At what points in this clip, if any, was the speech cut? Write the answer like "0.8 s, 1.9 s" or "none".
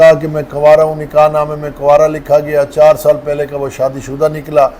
none